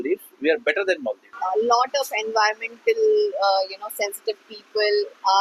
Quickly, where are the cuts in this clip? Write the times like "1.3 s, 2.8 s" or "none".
1.3 s